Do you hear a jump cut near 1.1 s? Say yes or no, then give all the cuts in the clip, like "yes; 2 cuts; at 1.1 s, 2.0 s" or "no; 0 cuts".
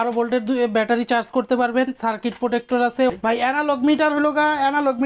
no; 1 cut; at 3.1 s